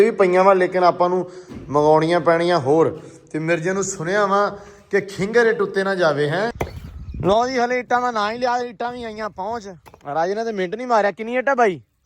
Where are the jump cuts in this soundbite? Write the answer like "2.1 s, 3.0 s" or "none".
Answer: 6.7 s